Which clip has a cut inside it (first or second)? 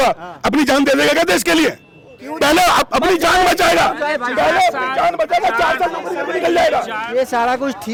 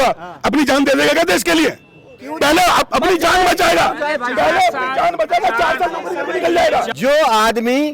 second